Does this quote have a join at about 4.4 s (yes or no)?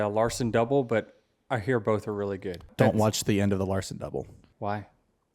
yes